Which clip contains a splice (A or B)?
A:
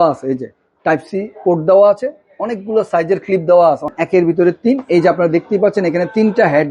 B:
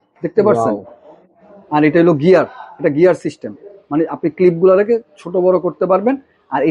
A